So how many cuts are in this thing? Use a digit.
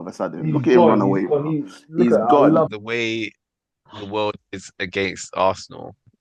1